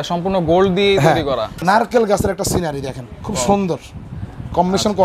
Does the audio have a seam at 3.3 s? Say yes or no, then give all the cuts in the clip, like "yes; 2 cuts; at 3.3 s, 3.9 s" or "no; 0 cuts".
no; 1 cut; at 1.6 s